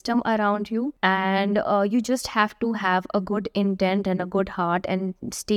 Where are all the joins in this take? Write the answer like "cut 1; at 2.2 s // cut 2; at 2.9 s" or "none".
cut 1; at 0.9 s